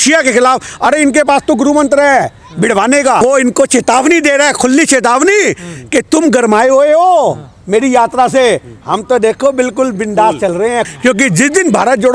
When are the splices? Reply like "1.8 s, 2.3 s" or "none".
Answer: 3.2 s, 10.9 s